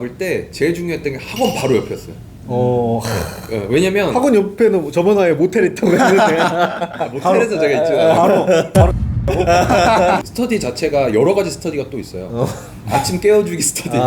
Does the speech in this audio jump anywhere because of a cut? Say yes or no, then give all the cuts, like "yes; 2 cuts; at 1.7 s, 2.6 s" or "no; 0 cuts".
yes; 1 cut; at 10.3 s